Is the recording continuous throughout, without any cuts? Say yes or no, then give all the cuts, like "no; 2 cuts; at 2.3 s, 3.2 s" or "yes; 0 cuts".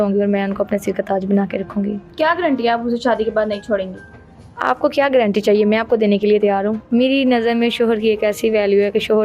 no; 2 cuts; at 2.1 s, 6.8 s